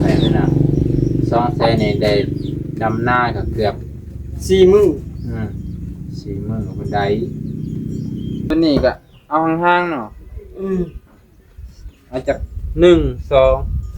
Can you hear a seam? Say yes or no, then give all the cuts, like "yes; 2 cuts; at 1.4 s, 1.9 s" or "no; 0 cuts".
yes; 1 cut; at 8.5 s